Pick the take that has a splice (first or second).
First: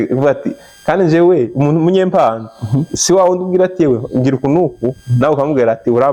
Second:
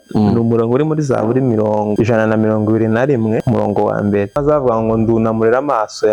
second